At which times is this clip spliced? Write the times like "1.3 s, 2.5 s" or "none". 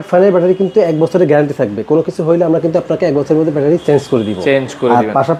none